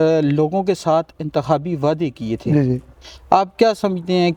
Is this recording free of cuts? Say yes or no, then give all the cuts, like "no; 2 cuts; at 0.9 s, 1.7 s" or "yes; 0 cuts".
yes; 0 cuts